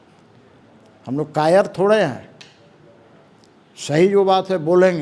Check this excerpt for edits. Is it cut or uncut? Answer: uncut